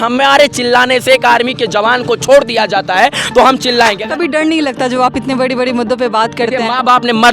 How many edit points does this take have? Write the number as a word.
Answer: one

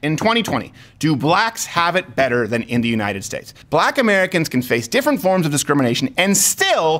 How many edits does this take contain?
one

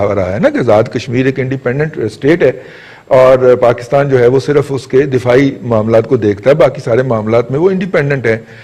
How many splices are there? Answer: zero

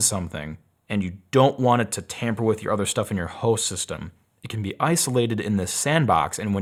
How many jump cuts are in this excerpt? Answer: zero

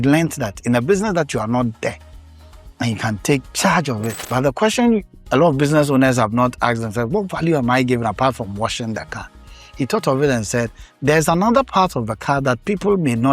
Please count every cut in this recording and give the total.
one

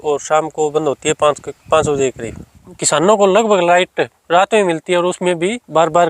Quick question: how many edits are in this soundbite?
one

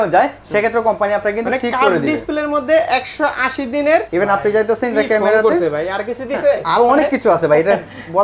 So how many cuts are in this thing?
one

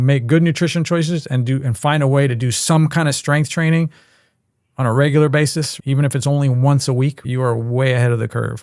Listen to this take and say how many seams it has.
two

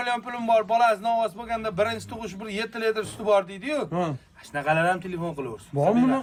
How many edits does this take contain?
zero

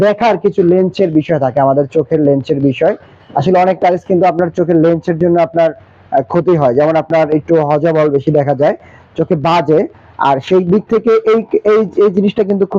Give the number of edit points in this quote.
zero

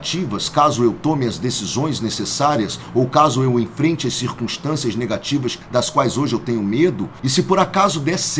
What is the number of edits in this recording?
two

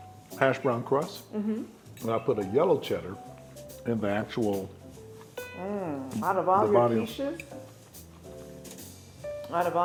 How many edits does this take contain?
zero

